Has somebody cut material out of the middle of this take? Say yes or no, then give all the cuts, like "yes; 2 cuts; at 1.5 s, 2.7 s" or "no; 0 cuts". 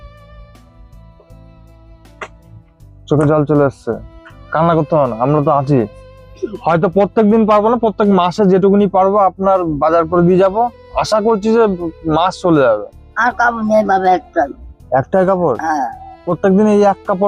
yes; 2 cuts; at 13.0 s, 16.3 s